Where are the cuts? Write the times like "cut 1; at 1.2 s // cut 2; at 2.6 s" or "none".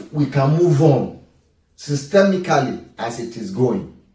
none